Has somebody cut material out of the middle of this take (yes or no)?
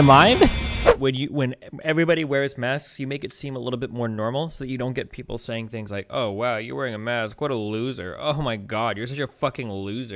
yes